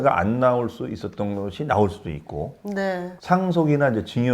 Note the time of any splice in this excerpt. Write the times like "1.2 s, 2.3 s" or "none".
3.2 s